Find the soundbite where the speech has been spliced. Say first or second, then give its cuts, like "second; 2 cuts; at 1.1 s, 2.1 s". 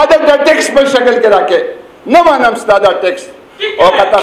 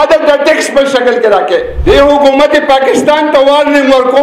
second; 1 cut; at 1.7 s